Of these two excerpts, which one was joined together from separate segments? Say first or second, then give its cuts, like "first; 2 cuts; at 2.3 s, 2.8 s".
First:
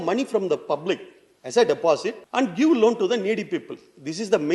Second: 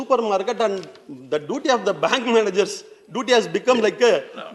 first; 1 cut; at 2.2 s